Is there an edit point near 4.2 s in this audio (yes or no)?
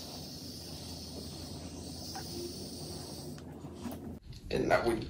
yes